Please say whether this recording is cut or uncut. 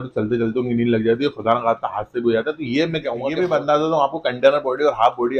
cut